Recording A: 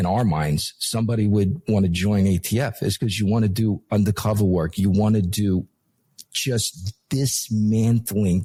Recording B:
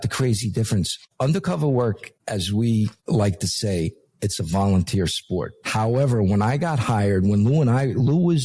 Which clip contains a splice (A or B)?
B